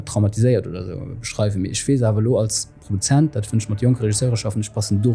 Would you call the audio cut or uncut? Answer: uncut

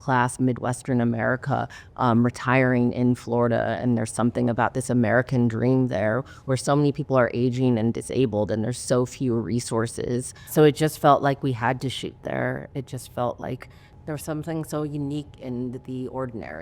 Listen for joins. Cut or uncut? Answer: cut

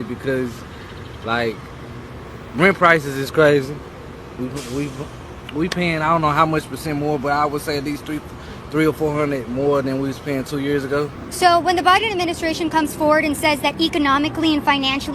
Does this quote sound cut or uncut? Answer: uncut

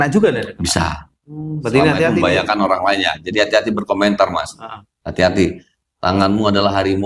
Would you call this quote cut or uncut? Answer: uncut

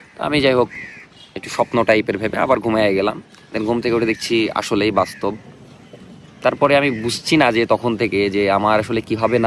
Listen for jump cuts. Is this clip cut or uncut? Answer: uncut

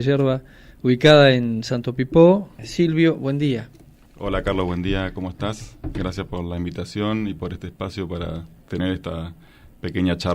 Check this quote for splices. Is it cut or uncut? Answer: cut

